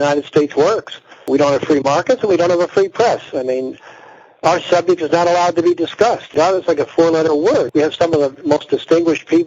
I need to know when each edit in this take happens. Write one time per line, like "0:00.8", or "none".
0:01.3